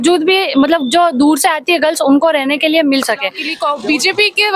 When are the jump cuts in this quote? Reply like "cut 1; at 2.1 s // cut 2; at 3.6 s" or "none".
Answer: cut 1; at 3.5 s